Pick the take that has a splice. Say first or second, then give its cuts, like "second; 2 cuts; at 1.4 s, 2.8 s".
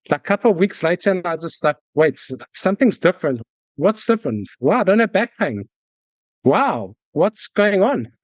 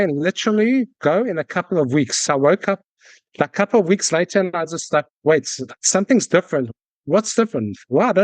second; 1 cut; at 2.2 s